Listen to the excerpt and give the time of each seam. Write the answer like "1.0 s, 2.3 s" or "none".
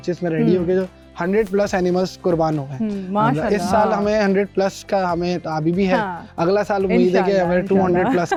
none